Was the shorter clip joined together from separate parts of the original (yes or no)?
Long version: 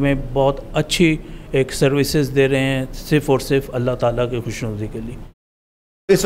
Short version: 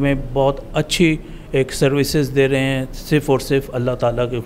no